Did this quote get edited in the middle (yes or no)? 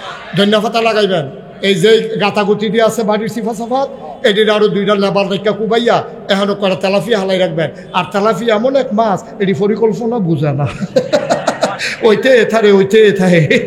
no